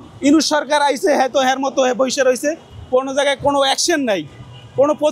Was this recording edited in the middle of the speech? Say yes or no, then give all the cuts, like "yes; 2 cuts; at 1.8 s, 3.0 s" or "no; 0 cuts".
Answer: no; 0 cuts